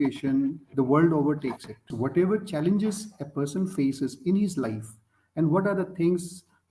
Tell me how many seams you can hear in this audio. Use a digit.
1